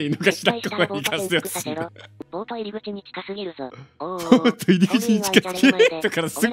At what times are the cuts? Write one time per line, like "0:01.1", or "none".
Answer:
0:02.2
0:05.5